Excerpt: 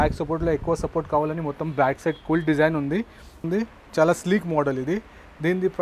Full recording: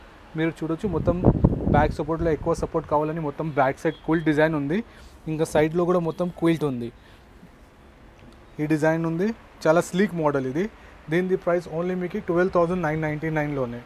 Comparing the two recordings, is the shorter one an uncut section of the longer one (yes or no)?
no